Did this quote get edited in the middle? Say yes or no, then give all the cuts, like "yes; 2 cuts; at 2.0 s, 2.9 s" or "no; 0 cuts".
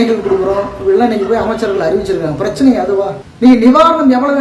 yes; 1 cut; at 3.2 s